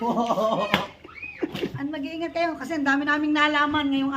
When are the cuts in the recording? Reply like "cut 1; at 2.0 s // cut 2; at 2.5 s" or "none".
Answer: cut 1; at 1.7 s